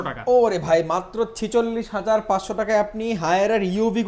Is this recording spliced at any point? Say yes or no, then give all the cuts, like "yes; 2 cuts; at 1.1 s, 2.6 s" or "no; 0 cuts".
no; 0 cuts